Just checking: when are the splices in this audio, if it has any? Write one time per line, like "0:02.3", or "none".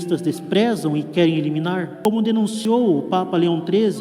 0:01.9
0:02.6